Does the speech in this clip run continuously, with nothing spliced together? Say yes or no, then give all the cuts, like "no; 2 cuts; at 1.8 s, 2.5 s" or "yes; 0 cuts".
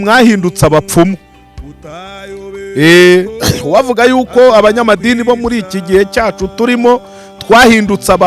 yes; 0 cuts